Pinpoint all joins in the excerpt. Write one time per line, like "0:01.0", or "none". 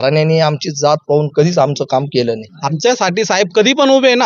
0:02.5